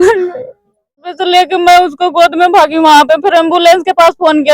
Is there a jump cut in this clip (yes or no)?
yes